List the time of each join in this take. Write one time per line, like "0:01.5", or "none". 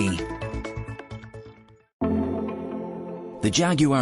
0:02.0